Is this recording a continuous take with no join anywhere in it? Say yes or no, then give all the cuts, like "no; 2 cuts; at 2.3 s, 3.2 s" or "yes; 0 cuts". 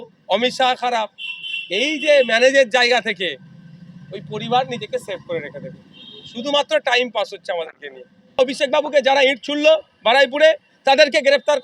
no; 1 cut; at 8.4 s